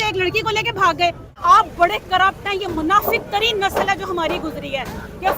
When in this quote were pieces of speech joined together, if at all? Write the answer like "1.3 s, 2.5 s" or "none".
1.4 s